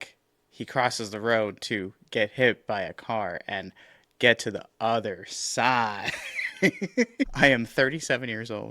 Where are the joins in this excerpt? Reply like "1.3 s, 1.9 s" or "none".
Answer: 7.3 s